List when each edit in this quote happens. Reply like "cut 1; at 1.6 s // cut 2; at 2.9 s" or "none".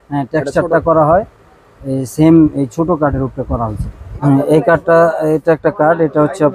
cut 1; at 4.2 s